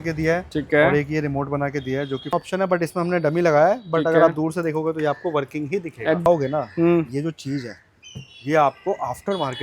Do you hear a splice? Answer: yes; 2 cuts; at 2.3 s, 6.3 s

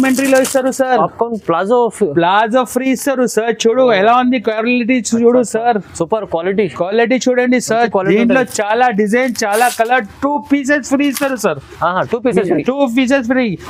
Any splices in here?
no; 0 cuts

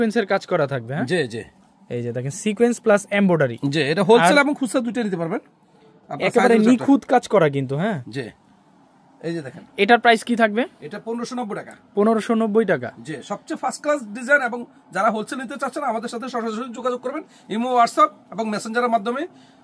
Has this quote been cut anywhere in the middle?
no; 0 cuts

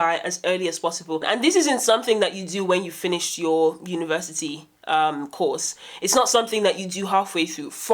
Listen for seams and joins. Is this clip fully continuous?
no; 1 cut; at 1.3 s

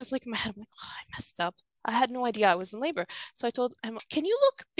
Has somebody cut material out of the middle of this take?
yes; 1 cut; at 3.9 s

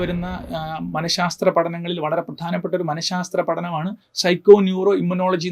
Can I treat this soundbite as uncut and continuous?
yes; 0 cuts

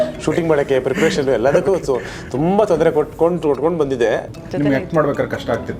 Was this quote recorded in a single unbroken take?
no; 1 cut; at 4.3 s

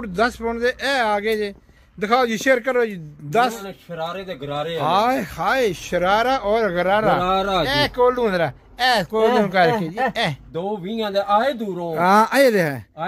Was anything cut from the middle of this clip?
yes; 2 cuts; at 3.7 s, 10.5 s

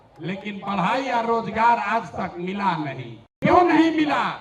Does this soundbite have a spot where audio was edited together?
yes; 1 cut; at 3.3 s

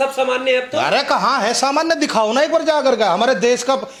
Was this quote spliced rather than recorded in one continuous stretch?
no; 0 cuts

